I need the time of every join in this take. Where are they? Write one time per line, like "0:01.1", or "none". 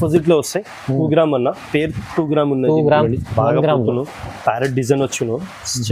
0:03.1